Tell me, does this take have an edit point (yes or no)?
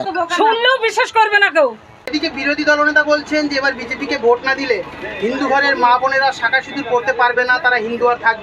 yes